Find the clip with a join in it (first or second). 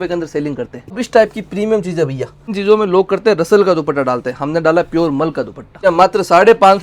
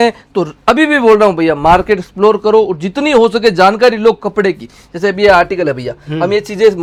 first